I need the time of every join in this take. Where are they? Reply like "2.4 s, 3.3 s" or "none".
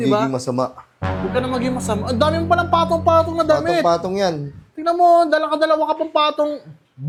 none